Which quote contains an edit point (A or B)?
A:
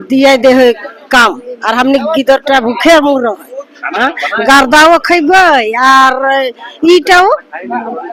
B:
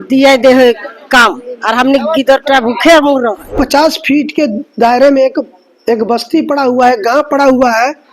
B